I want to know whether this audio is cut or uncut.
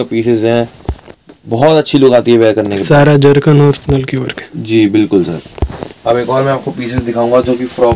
uncut